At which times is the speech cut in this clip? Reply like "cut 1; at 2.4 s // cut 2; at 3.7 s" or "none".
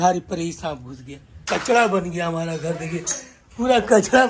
cut 1; at 1.4 s